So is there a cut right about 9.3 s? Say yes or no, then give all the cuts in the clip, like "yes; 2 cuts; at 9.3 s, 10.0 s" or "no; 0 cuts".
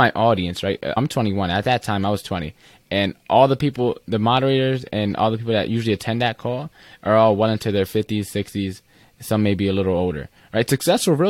no; 1 cut; at 1.0 s